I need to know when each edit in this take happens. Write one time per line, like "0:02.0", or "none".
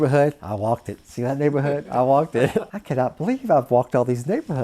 0:02.7

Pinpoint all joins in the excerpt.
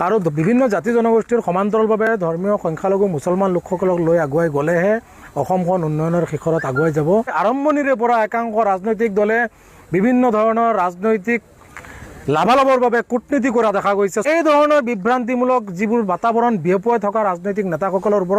0:07.3
0:14.2

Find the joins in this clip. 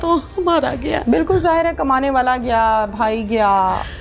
none

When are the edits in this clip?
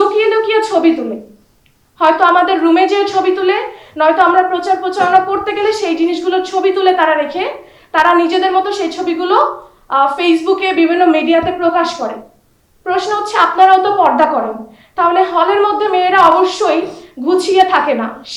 none

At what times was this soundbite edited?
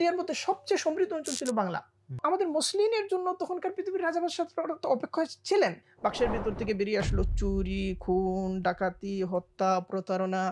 0:02.2
0:05.9

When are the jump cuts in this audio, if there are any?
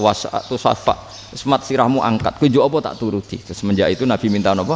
none

